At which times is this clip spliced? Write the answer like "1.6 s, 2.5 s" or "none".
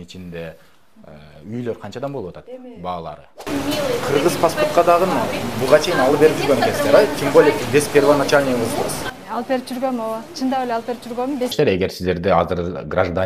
3.4 s, 11.5 s

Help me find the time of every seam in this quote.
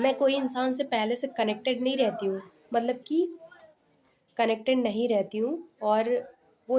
none

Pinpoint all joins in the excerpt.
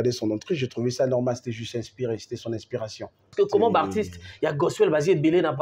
3.3 s

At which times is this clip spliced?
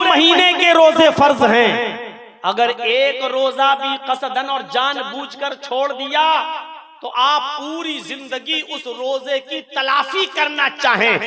none

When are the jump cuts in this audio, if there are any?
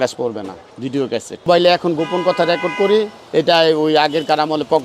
1.4 s, 3.2 s

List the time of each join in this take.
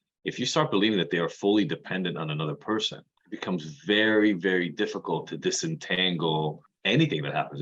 6.7 s

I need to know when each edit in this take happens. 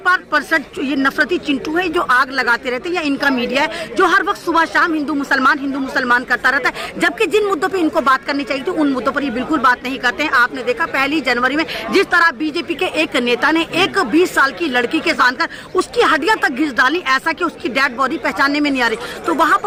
none

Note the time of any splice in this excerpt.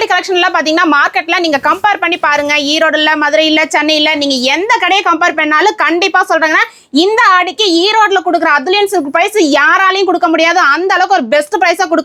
none

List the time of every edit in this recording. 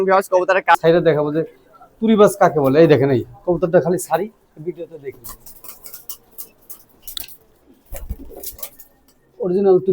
0.8 s, 7.6 s

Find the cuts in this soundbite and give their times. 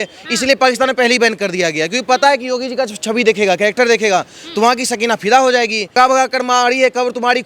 5.9 s

